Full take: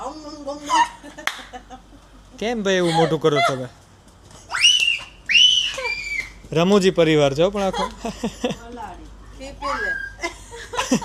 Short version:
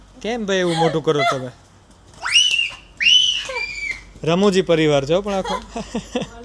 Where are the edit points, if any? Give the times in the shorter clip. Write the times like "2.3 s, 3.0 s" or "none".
2.1 s